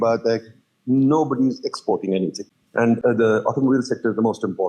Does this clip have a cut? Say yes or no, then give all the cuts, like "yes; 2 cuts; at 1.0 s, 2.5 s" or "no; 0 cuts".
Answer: yes; 1 cut; at 3.0 s